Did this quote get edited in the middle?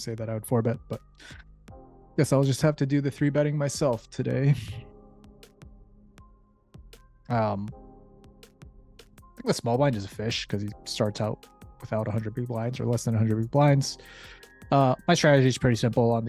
yes; 2 cuts; at 4.7 s, 7.3 s

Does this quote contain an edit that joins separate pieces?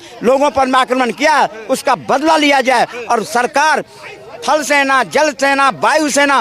no; 0 cuts

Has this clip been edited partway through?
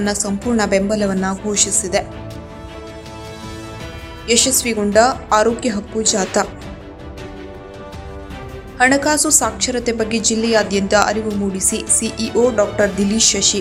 no; 0 cuts

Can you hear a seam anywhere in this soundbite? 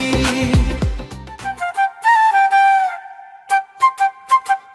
yes; 1 cut; at 1.6 s

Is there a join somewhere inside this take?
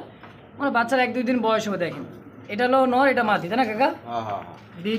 no; 0 cuts

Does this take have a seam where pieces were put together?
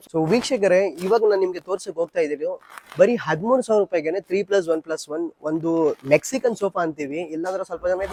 no; 0 cuts

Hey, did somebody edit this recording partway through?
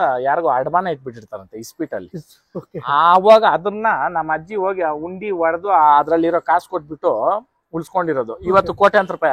no; 0 cuts

